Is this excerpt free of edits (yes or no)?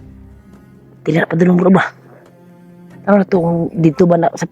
no